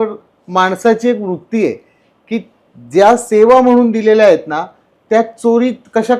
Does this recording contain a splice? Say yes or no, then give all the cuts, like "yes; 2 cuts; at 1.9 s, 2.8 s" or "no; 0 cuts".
no; 0 cuts